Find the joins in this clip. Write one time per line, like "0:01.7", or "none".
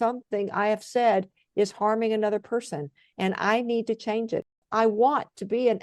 0:04.5